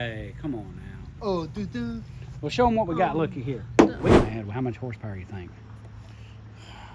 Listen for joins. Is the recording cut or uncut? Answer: cut